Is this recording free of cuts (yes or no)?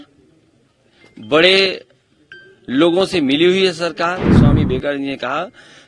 no